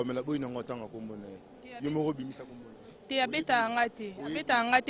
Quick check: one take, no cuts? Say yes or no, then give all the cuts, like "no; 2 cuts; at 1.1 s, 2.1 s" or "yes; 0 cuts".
yes; 0 cuts